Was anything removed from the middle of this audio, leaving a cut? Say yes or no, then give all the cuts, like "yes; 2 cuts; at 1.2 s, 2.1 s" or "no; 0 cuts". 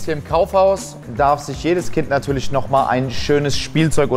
yes; 1 cut; at 1.0 s